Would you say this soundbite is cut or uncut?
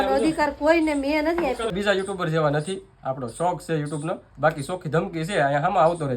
cut